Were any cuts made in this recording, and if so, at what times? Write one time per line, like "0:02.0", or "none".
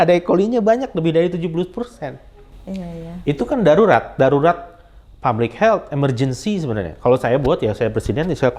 none